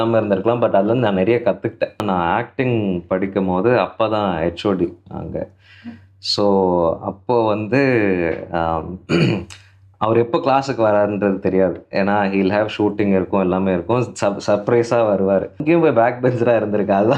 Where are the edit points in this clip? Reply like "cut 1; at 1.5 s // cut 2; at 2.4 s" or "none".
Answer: cut 1; at 2.0 s // cut 2; at 15.6 s

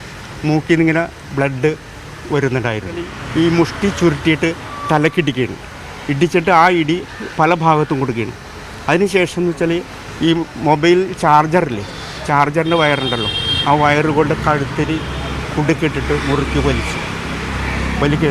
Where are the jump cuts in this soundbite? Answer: cut 1; at 3.2 s

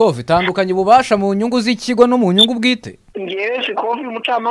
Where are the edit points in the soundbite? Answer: cut 1; at 3.0 s

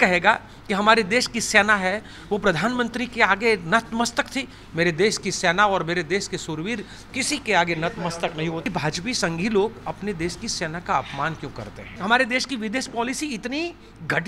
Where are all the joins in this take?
cut 1; at 8.6 s // cut 2; at 11.9 s

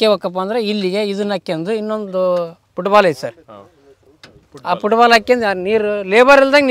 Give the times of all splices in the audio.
none

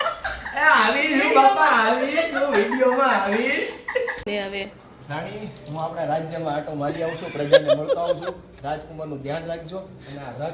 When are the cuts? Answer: cut 1; at 4.2 s

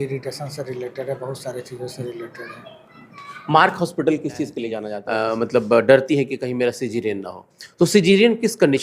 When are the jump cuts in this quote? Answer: cut 1; at 4.9 s

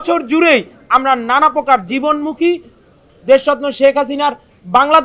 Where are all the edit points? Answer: none

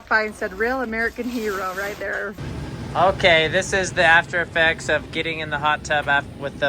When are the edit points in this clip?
cut 1; at 2.4 s

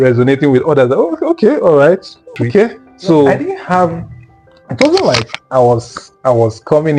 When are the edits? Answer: cut 1; at 3.4 s

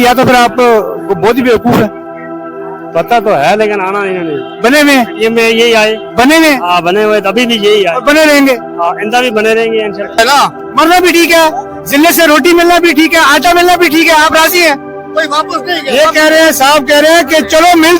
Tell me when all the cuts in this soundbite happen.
cut 1; at 10.1 s

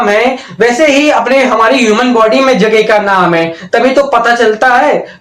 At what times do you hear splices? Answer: none

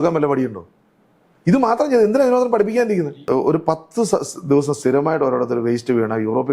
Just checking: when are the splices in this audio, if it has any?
cut 1; at 3.2 s

